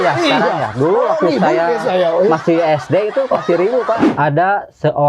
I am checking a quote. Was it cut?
yes; 1 cut; at 4.0 s

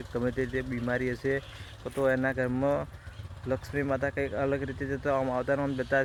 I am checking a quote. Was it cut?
no; 0 cuts

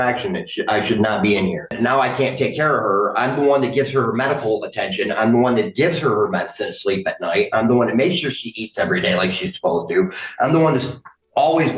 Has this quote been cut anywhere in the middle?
yes; 1 cut; at 1.7 s

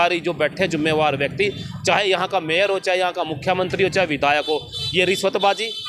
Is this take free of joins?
yes; 0 cuts

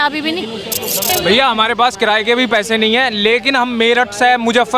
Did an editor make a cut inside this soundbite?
yes; 1 cut; at 1.1 s

